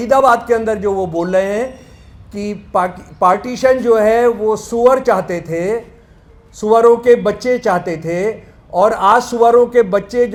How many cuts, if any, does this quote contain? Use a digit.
0